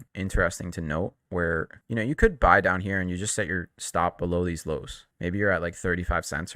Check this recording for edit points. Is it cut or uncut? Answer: uncut